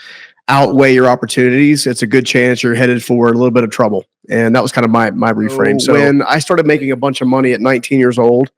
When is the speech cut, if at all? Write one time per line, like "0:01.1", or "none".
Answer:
0:05.8